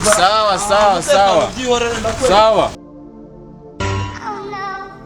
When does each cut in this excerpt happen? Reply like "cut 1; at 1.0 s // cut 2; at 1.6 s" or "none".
cut 1; at 2.9 s